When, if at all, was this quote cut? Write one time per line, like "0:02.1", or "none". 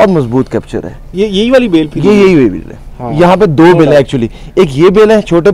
none

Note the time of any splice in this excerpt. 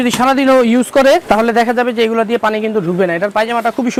none

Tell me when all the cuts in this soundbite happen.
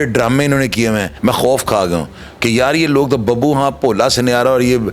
0:01.1

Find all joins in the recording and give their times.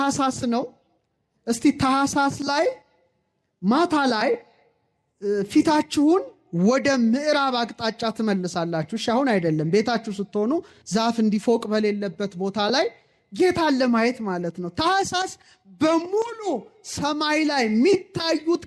none

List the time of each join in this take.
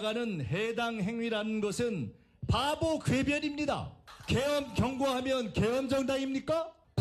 0:02.0

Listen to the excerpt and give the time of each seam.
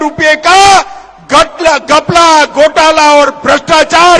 none

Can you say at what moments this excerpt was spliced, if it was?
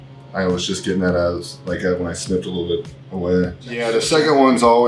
0:03.6

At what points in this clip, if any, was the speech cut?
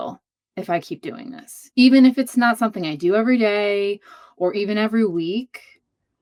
none

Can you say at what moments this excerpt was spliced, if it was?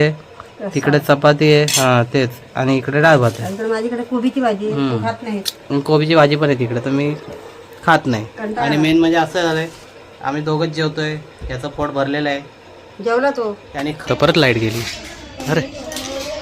0:14.0

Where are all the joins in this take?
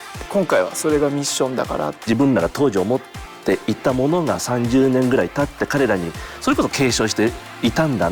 0:02.0

